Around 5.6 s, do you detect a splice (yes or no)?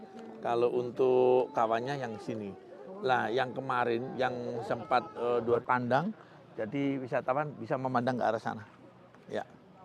yes